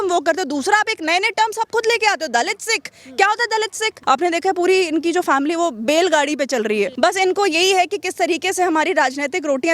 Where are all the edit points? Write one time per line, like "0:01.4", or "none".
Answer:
0:03.9
0:06.9